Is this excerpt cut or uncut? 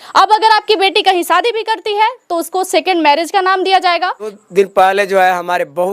cut